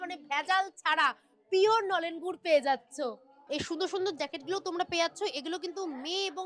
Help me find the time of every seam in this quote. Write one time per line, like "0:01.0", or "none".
0:03.3

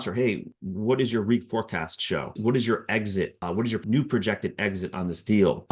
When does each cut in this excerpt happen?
0:02.3
0:03.8

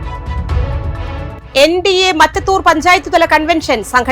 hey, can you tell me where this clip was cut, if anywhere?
0:01.4

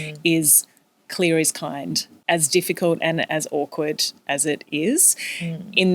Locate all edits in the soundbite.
0:02.2

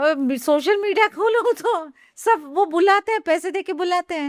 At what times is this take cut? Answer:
none

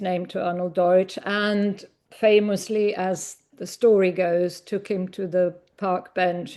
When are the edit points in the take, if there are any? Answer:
none

